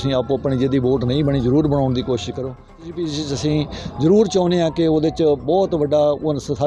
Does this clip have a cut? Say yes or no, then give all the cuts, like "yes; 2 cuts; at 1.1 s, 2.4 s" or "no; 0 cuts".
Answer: yes; 1 cut; at 2.9 s